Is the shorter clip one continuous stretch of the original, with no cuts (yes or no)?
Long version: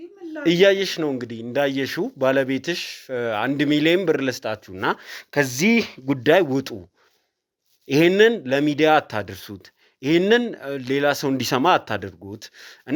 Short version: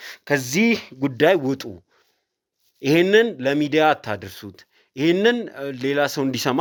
yes